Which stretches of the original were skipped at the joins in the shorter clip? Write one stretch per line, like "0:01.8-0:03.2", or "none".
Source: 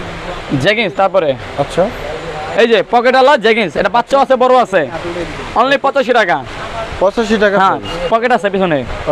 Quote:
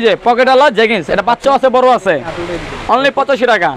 none